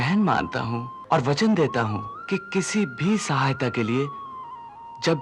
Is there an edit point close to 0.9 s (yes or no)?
yes